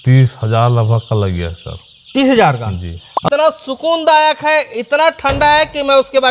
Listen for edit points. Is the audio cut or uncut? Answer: cut